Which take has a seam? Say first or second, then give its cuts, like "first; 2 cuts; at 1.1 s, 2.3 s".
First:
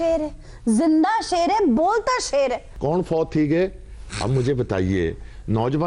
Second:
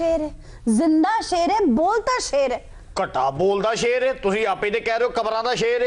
first; 1 cut; at 2.7 s